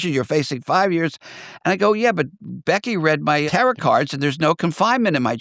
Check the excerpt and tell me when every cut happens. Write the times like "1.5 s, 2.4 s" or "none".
3.5 s